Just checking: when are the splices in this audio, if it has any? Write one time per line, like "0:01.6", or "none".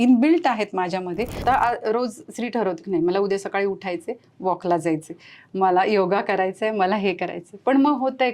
0:01.4